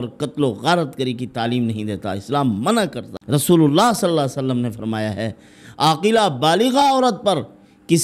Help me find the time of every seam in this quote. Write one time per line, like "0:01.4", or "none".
0:03.1